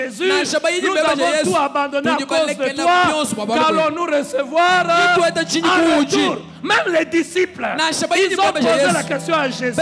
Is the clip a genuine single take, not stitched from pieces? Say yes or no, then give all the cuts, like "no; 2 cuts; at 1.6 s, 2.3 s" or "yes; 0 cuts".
yes; 0 cuts